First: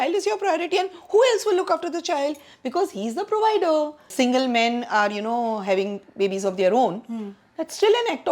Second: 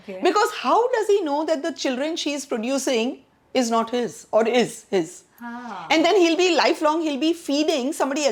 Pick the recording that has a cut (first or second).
first